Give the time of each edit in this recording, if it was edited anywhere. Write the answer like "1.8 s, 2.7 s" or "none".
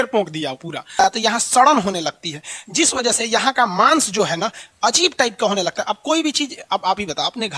0.9 s